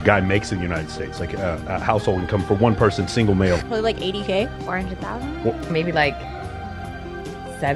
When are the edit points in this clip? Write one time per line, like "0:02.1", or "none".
0:05.7